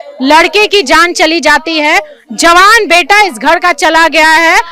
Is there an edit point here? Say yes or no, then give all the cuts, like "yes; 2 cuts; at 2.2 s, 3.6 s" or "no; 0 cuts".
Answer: no; 0 cuts